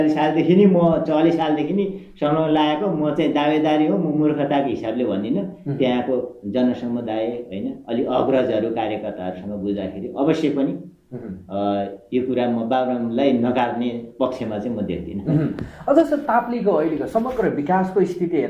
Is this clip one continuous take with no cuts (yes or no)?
yes